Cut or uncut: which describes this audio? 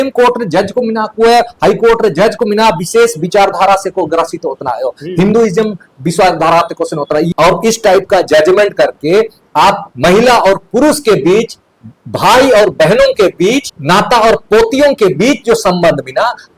cut